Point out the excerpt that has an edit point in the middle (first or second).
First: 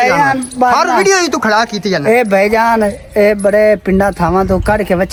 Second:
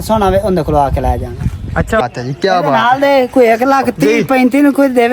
second